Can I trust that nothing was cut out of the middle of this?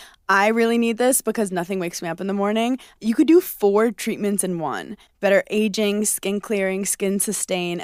yes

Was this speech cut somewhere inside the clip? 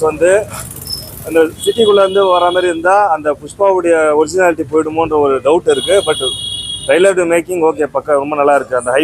no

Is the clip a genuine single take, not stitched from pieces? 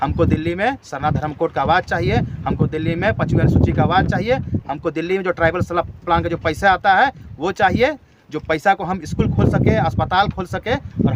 yes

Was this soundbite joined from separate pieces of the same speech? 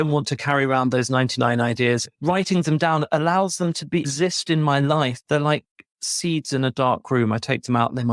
yes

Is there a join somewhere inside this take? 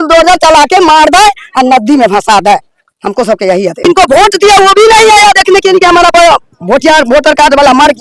yes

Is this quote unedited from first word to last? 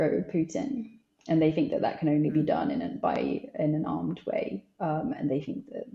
yes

